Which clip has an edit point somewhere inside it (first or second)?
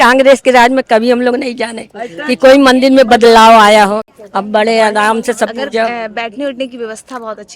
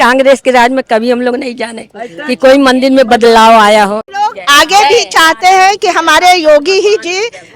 second